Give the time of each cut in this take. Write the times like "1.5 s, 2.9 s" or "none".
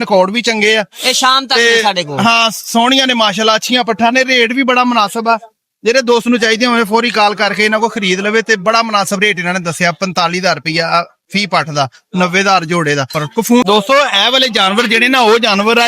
13.6 s